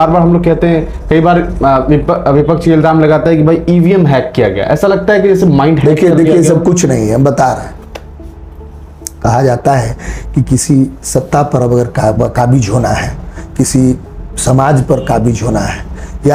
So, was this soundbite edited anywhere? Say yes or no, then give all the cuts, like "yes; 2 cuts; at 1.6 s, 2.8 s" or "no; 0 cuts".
no; 0 cuts